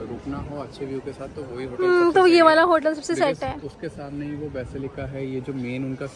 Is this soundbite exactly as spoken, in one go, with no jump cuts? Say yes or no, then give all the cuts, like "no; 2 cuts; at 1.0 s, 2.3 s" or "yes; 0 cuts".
yes; 0 cuts